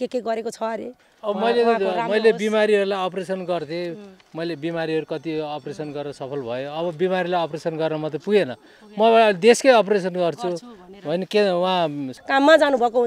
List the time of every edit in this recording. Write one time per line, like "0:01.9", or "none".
0:01.0
0:12.1